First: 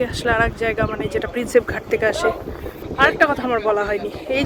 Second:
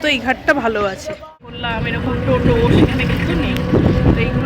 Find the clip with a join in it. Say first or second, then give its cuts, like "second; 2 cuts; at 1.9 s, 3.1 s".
second; 1 cut; at 1.5 s